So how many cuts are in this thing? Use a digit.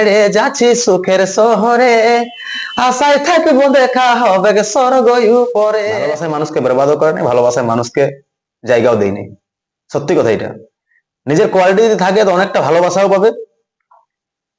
1